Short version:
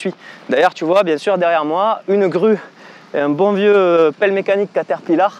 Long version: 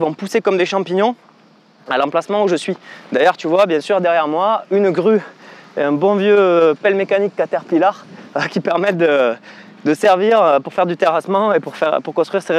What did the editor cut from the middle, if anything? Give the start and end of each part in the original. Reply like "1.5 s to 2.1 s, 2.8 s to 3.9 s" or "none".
none